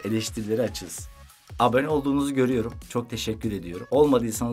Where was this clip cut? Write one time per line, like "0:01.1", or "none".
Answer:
none